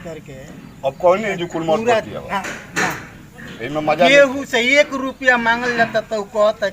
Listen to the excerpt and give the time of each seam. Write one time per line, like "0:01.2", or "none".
none